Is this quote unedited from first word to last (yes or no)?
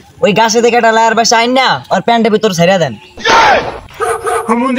yes